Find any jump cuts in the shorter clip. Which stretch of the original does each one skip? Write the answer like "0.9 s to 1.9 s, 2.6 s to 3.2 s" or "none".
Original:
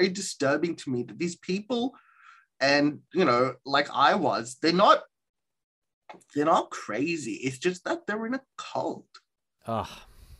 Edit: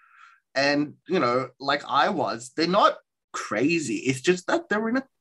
5.5 s to 6.8 s